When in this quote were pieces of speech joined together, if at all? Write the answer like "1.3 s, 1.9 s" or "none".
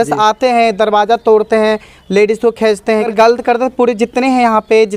3.1 s